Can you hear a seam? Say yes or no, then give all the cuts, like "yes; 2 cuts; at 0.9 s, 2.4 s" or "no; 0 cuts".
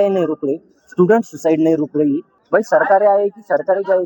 yes; 1 cut; at 2.3 s